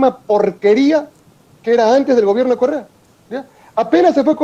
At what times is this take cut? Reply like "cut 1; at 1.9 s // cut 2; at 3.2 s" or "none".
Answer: none